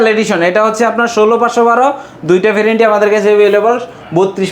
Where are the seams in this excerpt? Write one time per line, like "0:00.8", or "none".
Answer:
none